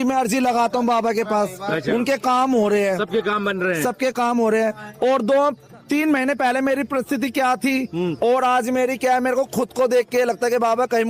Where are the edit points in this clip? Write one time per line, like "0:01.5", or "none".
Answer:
none